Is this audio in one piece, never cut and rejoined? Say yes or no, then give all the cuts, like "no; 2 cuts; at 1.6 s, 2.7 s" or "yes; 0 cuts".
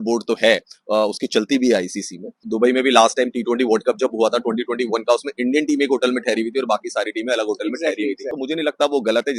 no; 2 cuts; at 2.4 s, 8.3 s